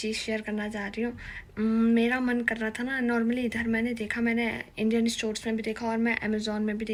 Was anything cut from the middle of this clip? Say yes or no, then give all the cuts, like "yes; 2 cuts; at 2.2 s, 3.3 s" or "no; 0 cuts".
no; 0 cuts